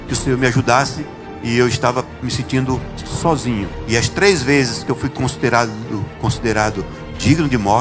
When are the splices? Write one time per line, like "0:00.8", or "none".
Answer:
0:03.7